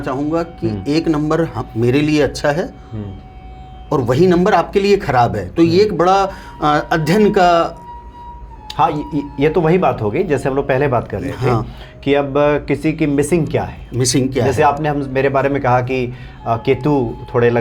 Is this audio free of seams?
yes; 0 cuts

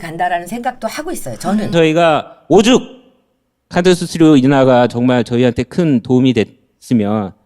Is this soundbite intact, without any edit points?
no; 1 cut; at 1.7 s

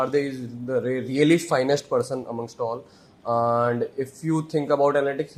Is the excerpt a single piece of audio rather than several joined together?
yes; 0 cuts

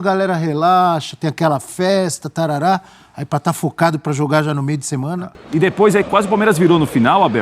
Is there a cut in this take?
yes; 1 cut; at 5.2 s

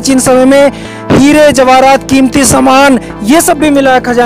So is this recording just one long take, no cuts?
yes; 0 cuts

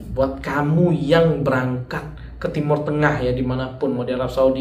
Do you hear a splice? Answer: no; 0 cuts

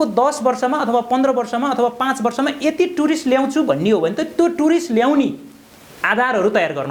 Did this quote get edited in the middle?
no; 0 cuts

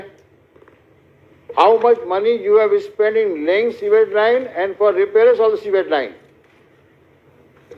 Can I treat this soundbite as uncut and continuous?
yes; 0 cuts

